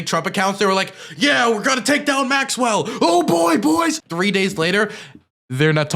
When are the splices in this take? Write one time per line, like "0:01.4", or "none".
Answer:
0:04.0